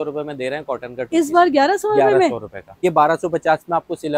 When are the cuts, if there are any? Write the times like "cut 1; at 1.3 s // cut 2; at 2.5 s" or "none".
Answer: cut 1; at 2.8 s